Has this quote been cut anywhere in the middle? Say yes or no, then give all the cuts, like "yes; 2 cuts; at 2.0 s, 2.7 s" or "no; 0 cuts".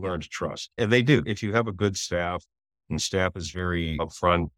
yes; 1 cut; at 1.3 s